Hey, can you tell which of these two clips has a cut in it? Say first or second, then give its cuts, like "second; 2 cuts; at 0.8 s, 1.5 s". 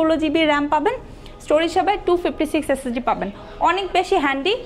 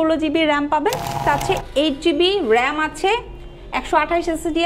second; 1 cut; at 1.2 s